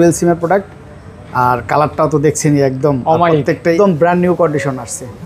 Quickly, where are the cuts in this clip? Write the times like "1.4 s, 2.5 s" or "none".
3.7 s